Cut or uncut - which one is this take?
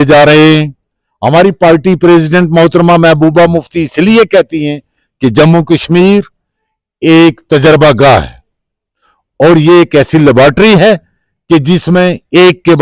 uncut